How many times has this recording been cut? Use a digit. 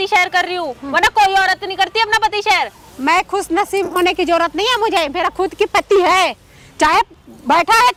0